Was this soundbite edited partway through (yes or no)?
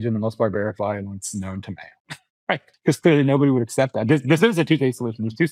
yes